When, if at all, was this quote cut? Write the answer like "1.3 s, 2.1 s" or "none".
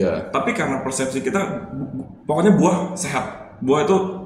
none